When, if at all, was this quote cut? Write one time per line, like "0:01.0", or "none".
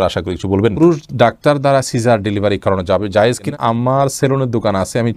0:00.7
0:03.5